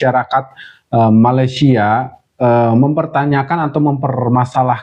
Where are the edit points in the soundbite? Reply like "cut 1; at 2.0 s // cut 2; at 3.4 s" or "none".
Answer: none